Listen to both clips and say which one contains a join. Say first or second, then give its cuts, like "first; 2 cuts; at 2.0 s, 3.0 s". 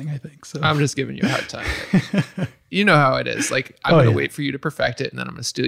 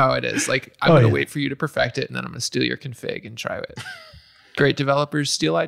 second; 1 cut; at 3.8 s